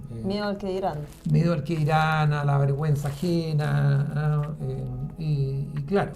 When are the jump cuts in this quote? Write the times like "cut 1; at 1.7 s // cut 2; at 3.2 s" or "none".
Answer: none